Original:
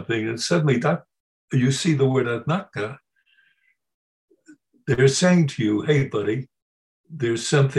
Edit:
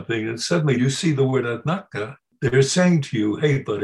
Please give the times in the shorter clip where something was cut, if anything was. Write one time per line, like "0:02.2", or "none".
0:00.8
0:02.2